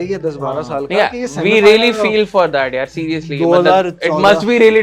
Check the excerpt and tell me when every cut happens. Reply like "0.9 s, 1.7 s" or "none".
none